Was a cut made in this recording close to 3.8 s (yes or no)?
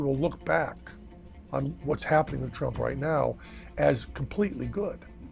no